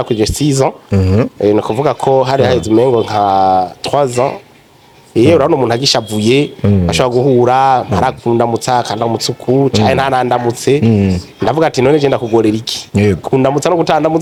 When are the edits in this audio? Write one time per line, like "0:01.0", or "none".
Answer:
none